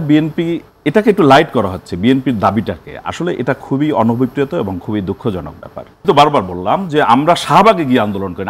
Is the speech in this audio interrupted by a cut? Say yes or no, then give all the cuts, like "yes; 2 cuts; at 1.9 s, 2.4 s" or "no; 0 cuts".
yes; 1 cut; at 6.0 s